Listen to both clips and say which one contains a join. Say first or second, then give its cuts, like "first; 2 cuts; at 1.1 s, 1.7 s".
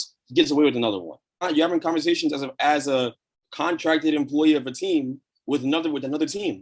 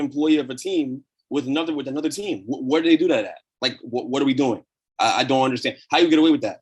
first; 1 cut; at 1.4 s